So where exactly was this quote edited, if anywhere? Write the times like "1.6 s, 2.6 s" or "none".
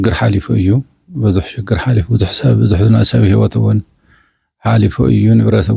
none